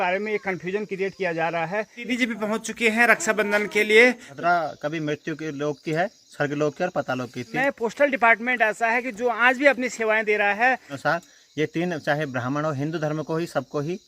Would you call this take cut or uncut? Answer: cut